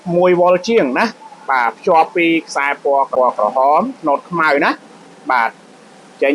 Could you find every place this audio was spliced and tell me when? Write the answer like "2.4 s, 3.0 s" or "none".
3.1 s